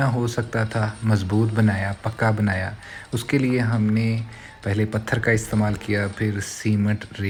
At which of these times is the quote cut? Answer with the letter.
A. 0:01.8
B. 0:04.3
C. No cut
C